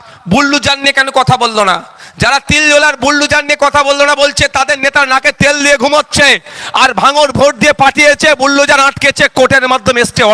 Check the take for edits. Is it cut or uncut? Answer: uncut